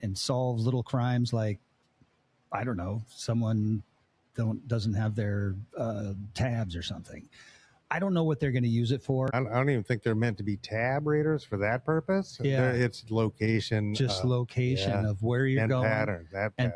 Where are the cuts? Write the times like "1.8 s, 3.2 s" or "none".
9.3 s